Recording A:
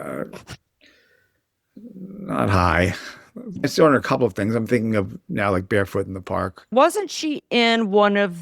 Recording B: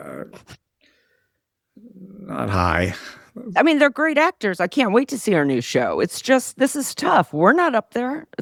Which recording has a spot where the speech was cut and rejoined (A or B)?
A